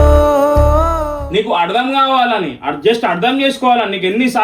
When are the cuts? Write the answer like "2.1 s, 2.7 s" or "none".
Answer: 1.1 s